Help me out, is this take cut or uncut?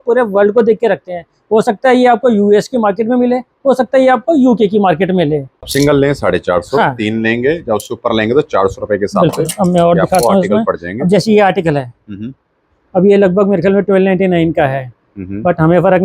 cut